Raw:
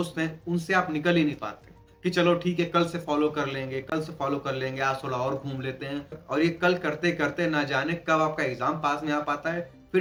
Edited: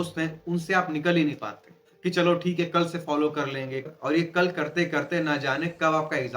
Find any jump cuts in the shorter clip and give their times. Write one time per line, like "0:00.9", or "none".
0:03.8